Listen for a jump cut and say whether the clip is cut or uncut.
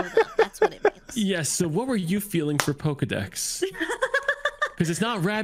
uncut